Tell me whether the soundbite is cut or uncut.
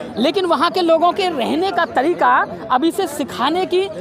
uncut